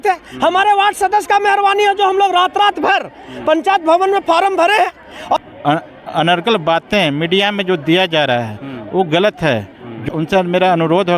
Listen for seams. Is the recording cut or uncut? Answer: cut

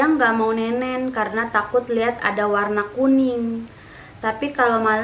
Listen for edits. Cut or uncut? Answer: uncut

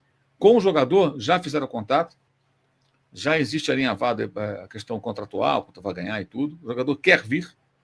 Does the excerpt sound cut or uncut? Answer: uncut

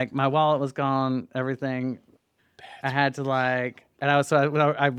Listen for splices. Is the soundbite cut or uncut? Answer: uncut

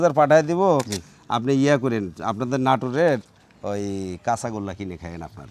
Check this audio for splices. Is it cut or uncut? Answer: uncut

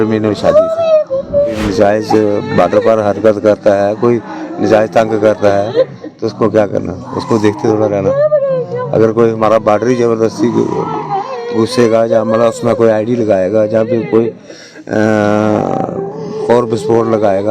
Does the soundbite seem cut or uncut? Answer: cut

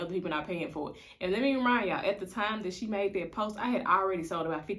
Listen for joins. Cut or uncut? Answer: uncut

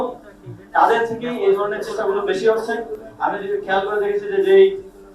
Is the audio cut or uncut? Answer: uncut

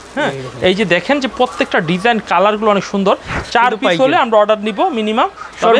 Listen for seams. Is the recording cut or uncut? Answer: cut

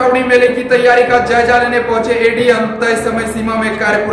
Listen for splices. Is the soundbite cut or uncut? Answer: uncut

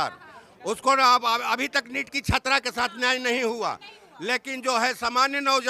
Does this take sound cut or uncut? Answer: uncut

